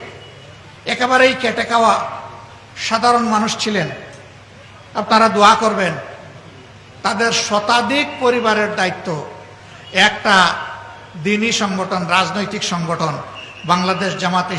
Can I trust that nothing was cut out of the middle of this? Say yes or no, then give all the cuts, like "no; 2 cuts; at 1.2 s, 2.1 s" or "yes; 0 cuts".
yes; 0 cuts